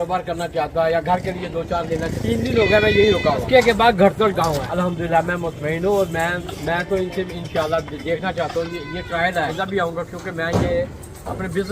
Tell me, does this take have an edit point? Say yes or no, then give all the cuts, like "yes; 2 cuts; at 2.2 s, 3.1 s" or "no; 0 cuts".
yes; 4 cuts; at 2.1 s, 3.4 s, 4.7 s, 9.5 s